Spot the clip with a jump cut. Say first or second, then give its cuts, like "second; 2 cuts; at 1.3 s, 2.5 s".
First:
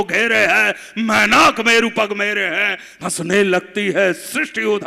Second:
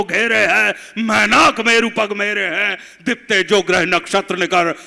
first; 1 cut; at 2.9 s